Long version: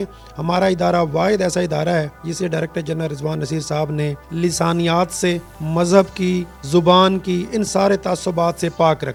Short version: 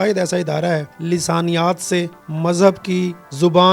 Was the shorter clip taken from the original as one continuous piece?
no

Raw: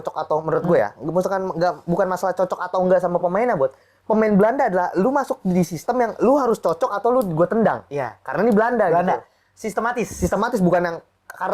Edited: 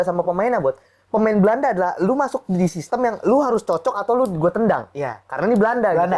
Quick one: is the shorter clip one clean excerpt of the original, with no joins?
yes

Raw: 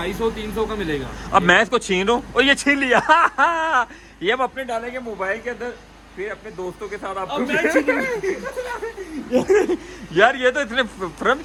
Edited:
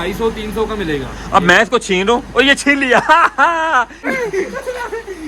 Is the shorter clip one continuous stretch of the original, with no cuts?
no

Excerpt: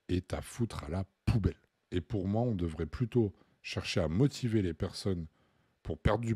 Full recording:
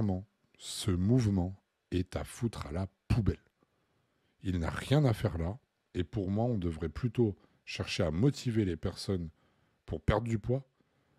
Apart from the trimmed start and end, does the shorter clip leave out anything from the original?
yes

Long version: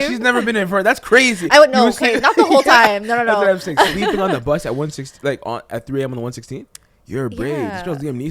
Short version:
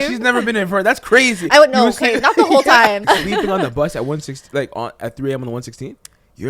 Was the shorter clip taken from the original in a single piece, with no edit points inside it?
no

